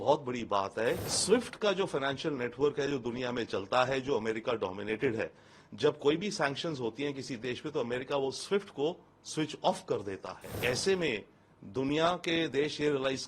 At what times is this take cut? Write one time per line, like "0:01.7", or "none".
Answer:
0:01.0
0:10.6